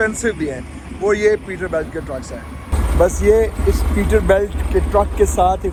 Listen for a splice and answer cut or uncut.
uncut